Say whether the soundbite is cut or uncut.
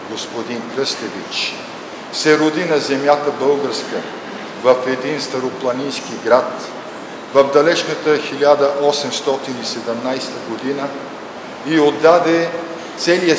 uncut